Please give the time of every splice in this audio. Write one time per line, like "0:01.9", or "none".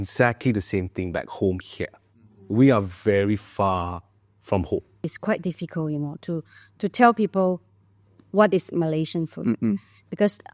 0:05.1